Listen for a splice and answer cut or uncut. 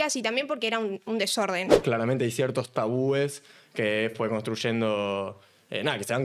cut